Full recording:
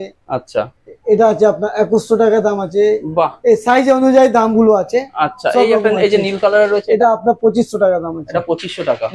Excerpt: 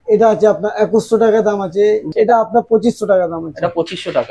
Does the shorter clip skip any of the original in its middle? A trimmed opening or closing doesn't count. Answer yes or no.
yes